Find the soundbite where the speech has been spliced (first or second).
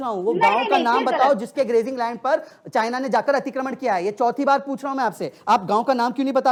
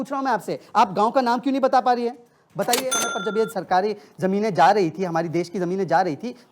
second